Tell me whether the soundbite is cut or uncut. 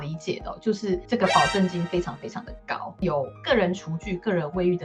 cut